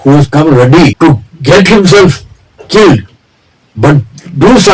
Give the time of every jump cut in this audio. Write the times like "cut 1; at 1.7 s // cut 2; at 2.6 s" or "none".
cut 1; at 0.9 s